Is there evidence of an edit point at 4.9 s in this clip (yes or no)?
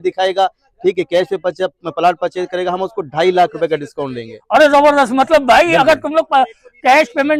no